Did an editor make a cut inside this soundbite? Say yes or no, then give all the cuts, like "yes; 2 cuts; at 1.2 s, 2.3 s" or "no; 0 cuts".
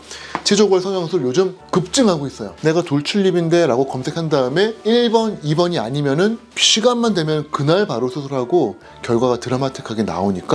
no; 0 cuts